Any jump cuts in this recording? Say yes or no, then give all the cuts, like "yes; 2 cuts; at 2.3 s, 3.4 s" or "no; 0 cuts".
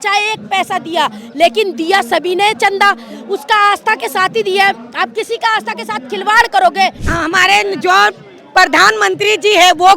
yes; 1 cut; at 7.0 s